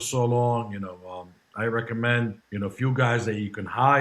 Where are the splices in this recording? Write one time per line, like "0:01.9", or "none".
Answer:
0:02.4